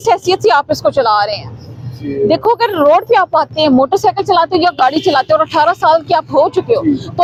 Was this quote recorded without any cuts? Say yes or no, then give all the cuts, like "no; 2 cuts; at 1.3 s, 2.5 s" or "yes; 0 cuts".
yes; 0 cuts